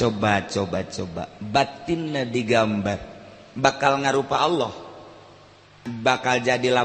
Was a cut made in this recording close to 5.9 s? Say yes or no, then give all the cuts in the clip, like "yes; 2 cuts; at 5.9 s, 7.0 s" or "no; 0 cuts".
yes; 1 cut; at 5.9 s